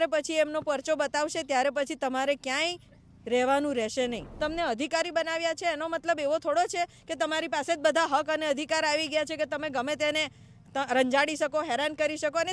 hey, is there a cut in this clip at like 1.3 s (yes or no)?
no